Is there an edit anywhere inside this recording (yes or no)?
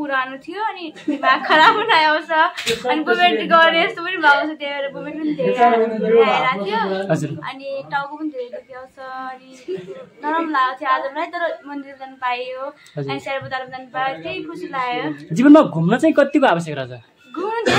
no